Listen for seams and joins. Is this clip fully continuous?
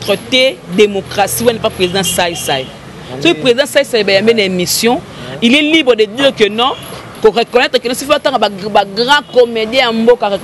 yes; 0 cuts

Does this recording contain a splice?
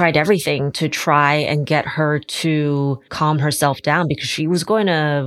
yes; 1 cut; at 3.1 s

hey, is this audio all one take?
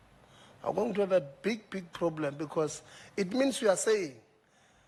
yes; 0 cuts

